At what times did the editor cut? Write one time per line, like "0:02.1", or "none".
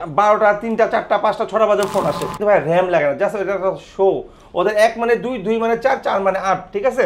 0:02.3